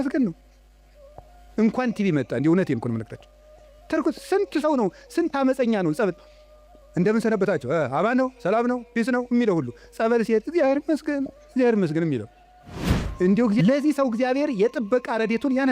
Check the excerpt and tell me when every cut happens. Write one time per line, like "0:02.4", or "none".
0:13.6